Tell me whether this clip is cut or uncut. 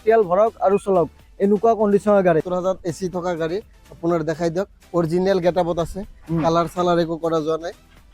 cut